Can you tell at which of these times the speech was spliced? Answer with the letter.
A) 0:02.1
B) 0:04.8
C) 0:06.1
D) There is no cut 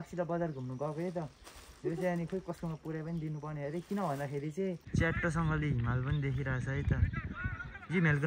B